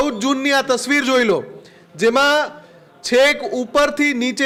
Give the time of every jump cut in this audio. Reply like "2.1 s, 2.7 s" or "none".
none